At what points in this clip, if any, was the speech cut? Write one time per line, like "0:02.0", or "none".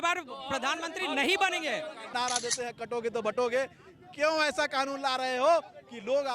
0:02.1